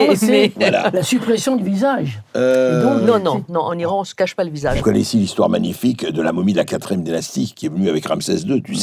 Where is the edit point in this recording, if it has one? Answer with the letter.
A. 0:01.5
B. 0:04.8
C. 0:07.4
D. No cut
B